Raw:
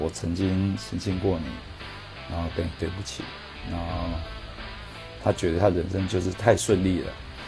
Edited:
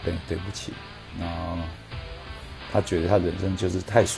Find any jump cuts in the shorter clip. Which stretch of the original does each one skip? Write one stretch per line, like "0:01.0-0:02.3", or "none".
none